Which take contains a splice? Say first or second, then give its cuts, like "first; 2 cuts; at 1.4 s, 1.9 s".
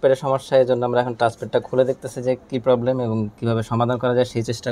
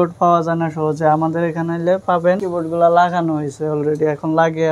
second; 1 cut; at 2.4 s